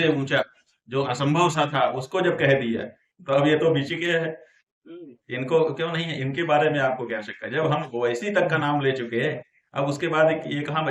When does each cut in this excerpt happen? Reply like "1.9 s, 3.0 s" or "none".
none

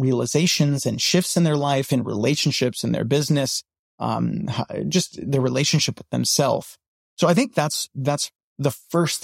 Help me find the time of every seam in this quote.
none

